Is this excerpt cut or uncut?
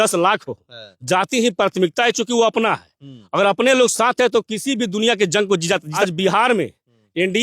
cut